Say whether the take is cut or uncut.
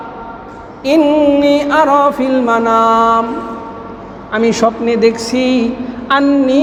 uncut